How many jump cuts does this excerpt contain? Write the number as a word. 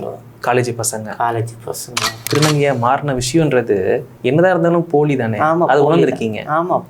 one